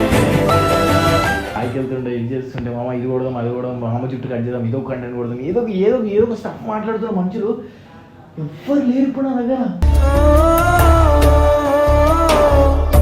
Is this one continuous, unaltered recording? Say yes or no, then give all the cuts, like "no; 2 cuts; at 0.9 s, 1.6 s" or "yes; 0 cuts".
no; 1 cut; at 1.6 s